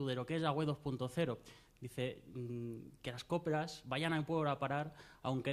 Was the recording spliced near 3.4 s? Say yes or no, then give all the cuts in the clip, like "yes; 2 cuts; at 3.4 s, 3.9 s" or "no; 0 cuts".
no; 0 cuts